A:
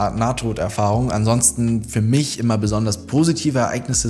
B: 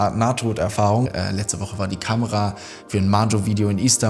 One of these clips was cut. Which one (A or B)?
B